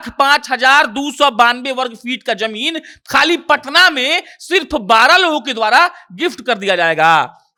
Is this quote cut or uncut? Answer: uncut